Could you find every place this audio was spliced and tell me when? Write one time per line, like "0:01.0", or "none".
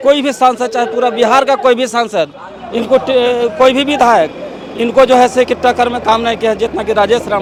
none

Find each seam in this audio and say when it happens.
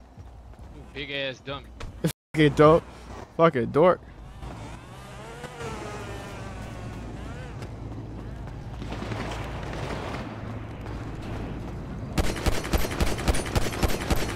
none

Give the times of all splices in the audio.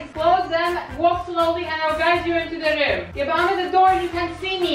none

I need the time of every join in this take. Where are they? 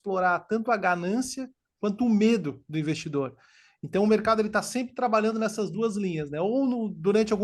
none

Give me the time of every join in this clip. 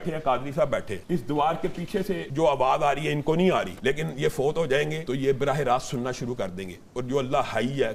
0:00.9
0:02.3
0:03.7
0:05.0

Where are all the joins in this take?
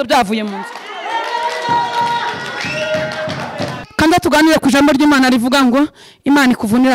0:03.8

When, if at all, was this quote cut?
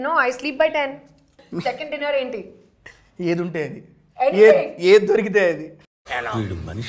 0:01.4

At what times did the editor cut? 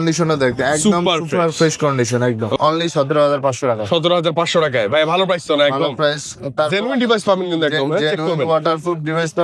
0:02.6

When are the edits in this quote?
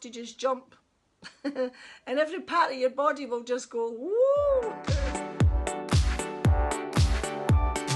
0:04.8

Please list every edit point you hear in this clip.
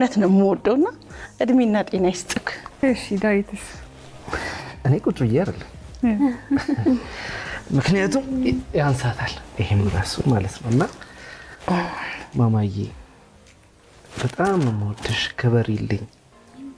0:02.7

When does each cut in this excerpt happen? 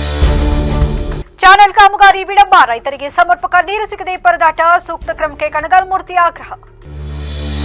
0:01.2

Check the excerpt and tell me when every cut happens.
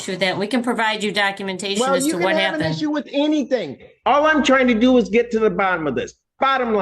none

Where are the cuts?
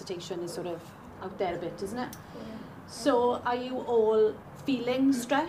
0:04.4

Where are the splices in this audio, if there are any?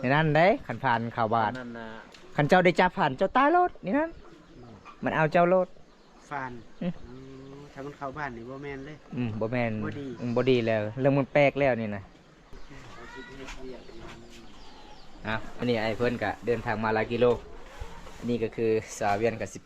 0:12.5
0:15.5

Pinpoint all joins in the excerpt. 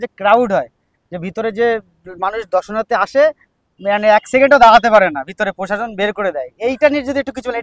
none

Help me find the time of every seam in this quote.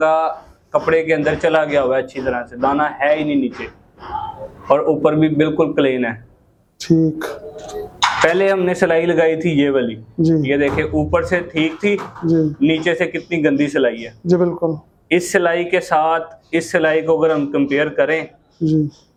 none

